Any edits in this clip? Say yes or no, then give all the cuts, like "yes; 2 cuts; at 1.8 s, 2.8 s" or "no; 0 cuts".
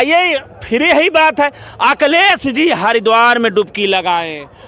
no; 0 cuts